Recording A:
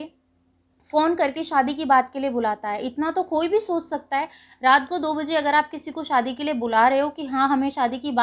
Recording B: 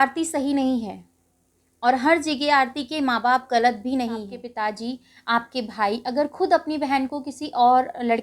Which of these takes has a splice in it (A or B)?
B